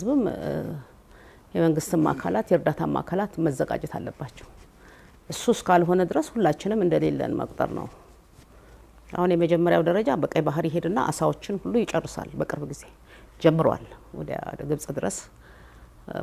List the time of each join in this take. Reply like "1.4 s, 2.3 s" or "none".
none